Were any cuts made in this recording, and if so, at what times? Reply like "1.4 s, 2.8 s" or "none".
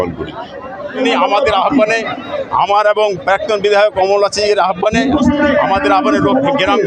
1.0 s